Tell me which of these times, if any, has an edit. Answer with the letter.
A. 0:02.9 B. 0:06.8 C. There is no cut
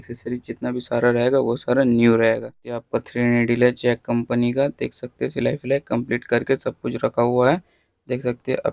A